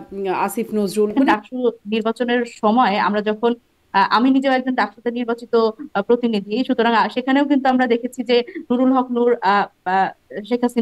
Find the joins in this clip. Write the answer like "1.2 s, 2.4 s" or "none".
1.1 s